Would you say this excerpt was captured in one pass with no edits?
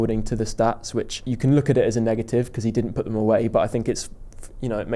no; 1 cut; at 1.2 s

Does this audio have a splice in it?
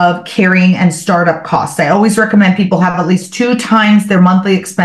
no; 0 cuts

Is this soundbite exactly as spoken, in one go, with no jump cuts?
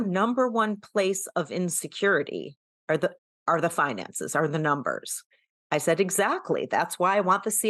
yes; 0 cuts

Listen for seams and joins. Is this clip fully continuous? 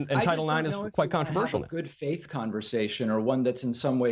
no; 1 cut; at 2.6 s

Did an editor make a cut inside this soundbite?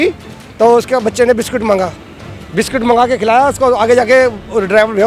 no; 0 cuts

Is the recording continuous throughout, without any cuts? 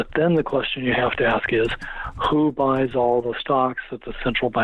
yes; 0 cuts

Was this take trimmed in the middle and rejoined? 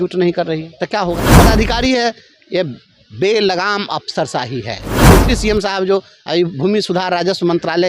yes; 2 cuts; at 1.4 s, 4.9 s

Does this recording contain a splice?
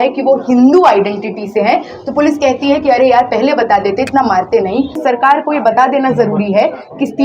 yes; 1 cut; at 5.0 s

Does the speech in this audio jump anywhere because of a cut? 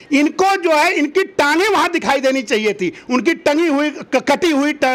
no; 0 cuts

